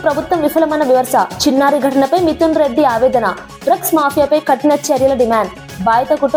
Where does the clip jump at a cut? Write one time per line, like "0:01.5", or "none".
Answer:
none